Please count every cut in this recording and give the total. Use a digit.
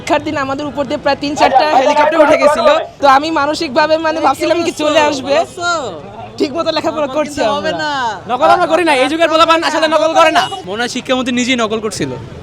2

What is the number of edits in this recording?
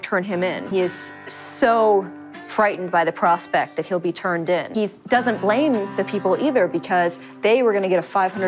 0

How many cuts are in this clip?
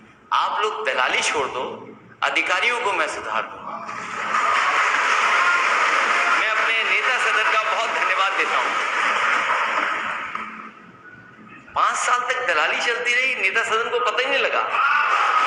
0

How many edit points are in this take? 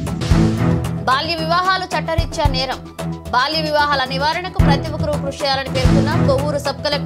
1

